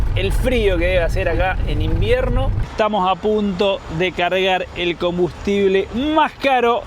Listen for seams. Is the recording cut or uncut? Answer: cut